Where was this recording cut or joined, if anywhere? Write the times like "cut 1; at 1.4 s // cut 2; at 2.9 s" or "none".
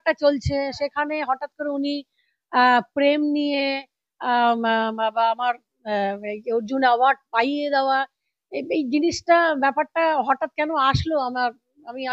none

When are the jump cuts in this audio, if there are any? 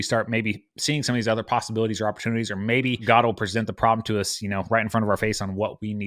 cut 1; at 3.0 s

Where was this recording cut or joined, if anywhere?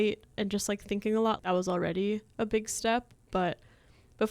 cut 1; at 1.4 s

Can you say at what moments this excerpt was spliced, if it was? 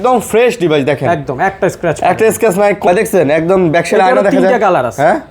cut 1; at 2.8 s

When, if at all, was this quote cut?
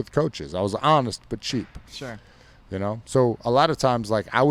none

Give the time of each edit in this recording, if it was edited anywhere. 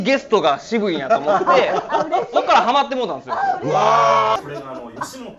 cut 1; at 4.4 s

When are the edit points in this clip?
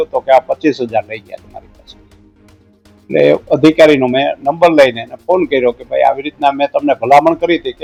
none

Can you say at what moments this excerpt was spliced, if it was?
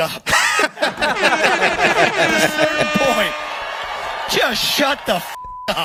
none

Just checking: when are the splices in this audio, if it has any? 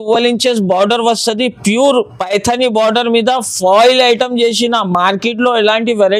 none

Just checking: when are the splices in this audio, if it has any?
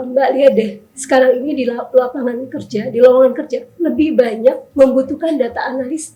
none

